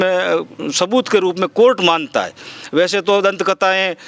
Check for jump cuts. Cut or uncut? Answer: uncut